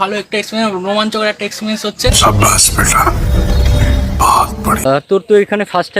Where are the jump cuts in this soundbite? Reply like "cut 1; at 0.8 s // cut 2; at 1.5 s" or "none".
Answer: cut 1; at 4.8 s